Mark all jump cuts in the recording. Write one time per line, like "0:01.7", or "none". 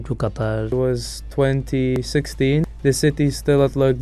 0:02.2

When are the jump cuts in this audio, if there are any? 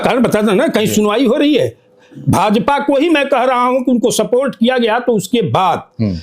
none

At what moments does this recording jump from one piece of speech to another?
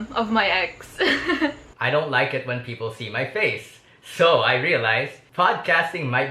0:01.7
0:05.0

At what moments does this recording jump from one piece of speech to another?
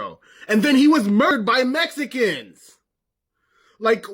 0:01.3

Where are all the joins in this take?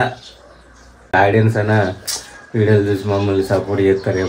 0:01.1

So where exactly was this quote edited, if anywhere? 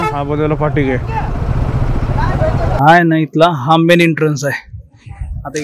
0:02.8

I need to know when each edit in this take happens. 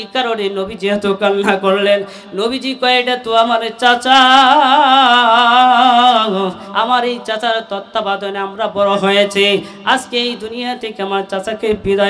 0:06.6

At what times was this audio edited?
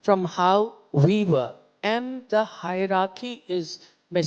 0:01.6

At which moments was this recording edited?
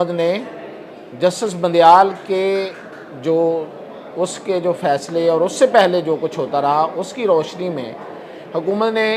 none

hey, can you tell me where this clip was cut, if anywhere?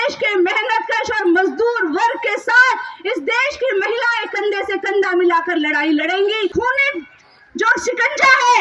0:06.5

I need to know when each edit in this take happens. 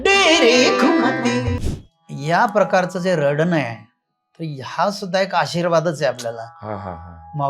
0:01.5

